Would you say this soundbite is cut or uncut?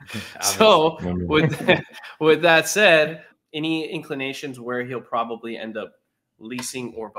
cut